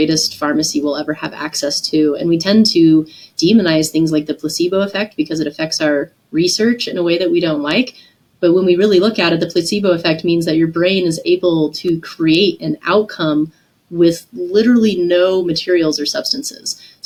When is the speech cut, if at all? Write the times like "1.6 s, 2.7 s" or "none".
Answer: none